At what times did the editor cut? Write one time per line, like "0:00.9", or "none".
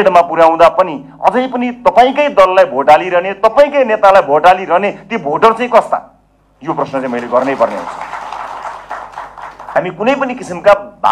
0:09.8

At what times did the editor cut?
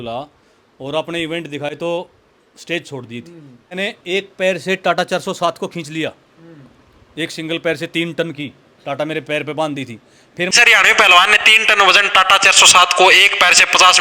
0:01.8
0:03.7
0:10.5

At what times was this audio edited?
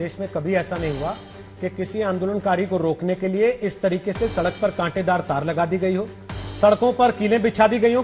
none

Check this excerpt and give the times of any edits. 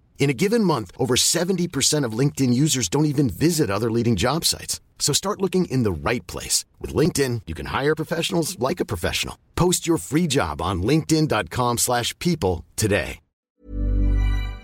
0:13.4

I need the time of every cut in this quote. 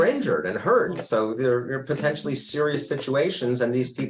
0:01.0

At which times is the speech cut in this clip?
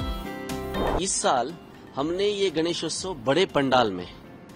0:00.9

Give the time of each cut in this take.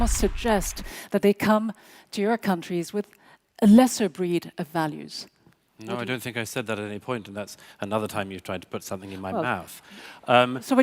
none

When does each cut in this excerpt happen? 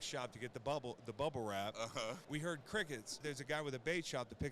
0:02.2
0:03.2

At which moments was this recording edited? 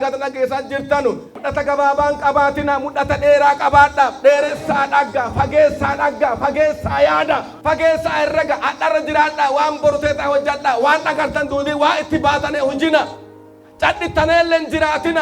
0:01.3
0:07.5

